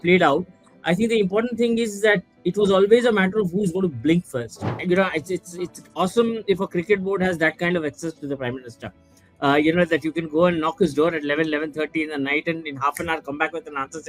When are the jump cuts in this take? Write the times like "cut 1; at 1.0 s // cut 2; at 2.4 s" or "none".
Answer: cut 1; at 4.7 s